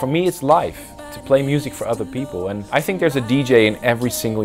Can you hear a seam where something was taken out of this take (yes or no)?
yes